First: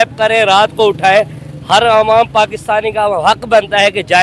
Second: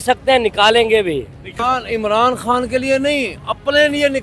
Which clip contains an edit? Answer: second; 1 cut; at 1.6 s

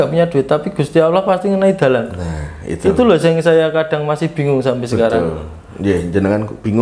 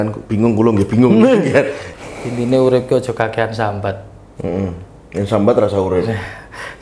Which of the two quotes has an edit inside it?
second; 1 cut; at 1.8 s

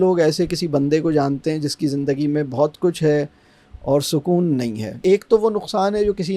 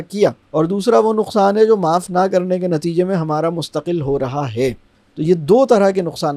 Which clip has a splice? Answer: first; 1 cut; at 5.0 s

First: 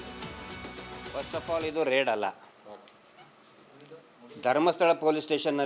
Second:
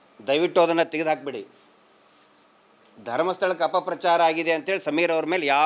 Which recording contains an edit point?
first; 1 cut; at 1.1 s

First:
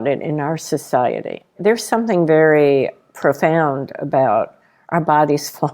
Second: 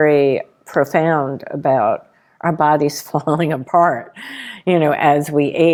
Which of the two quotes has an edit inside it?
first; 1 cut; at 1.6 s

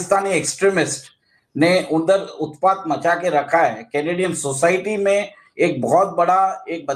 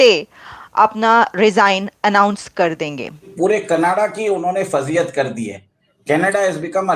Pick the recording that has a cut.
second; 1 cut; at 3.3 s

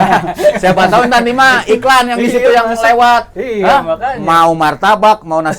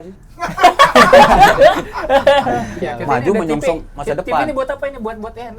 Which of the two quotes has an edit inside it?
second; 1 cut; at 2.8 s

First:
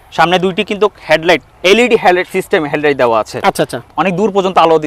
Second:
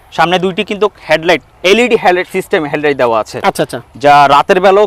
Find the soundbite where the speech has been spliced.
first; 1 cut; at 3.9 s

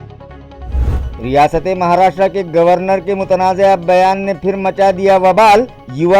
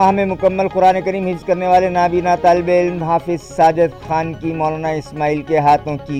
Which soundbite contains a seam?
first; 1 cut; at 0.9 s

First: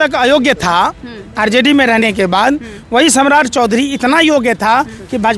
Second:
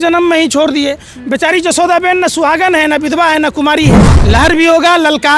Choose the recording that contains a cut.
second; 1 cut; at 4.1 s

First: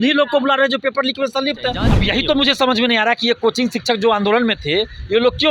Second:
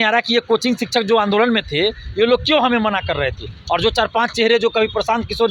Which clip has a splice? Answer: first; 1 cut; at 1.9 s

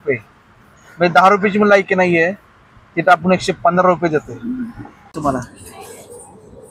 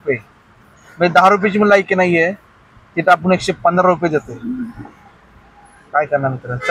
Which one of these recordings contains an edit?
first; 1 cut; at 5.1 s

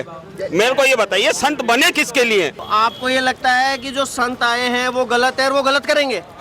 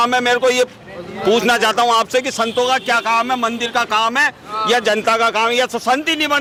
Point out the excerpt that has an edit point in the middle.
first; 1 cut; at 2.6 s

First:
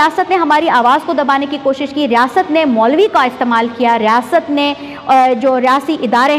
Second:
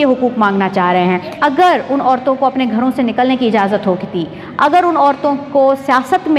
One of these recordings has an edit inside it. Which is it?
second; 1 cut; at 1.4 s

